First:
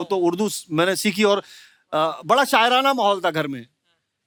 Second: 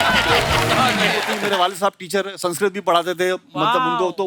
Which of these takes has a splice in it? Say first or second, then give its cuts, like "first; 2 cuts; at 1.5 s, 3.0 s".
second; 1 cut; at 1.3 s